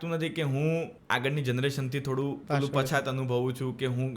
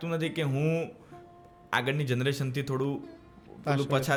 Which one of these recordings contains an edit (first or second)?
first